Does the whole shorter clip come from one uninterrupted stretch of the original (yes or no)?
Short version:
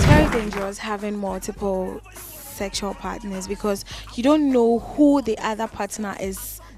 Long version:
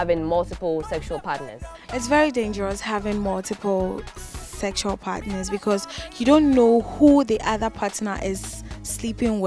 yes